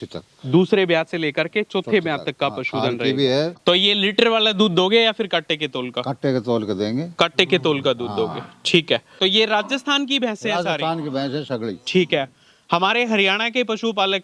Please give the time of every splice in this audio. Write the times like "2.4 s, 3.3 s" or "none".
3.6 s, 9.1 s